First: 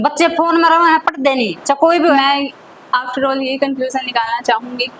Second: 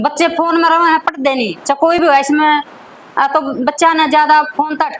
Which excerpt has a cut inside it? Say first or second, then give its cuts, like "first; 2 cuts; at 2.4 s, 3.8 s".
first; 1 cut; at 2.0 s